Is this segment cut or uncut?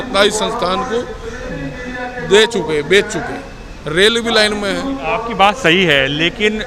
uncut